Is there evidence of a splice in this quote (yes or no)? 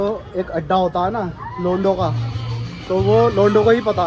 no